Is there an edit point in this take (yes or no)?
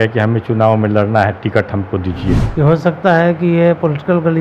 yes